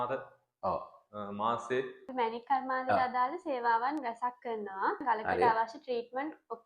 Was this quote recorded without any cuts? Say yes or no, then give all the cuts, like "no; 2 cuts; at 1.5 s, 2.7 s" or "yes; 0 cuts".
no; 2 cuts; at 2.1 s, 5.0 s